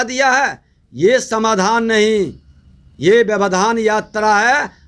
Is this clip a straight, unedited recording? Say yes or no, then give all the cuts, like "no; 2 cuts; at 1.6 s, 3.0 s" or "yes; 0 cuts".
yes; 0 cuts